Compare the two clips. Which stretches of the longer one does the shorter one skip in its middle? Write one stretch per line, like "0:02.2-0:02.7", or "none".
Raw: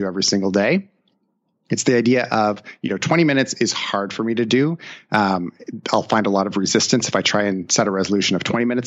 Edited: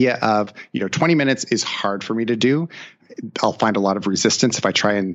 0:05.0-0:05.5